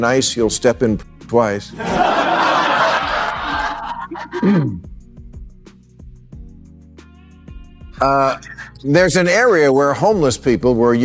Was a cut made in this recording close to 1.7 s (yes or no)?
no